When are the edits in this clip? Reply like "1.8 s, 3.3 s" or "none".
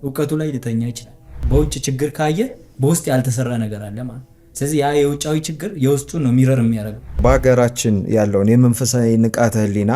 1.3 s, 7.2 s